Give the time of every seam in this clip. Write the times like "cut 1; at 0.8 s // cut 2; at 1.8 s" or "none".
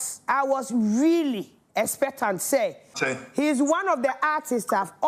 cut 1; at 2.9 s